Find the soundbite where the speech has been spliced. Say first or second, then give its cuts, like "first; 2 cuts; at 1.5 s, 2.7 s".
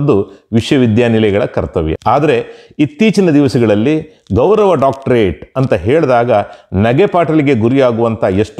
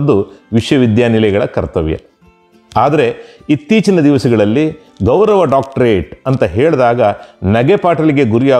first; 1 cut; at 2.0 s